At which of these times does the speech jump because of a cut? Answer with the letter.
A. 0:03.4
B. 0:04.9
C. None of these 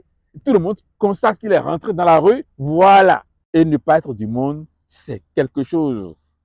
A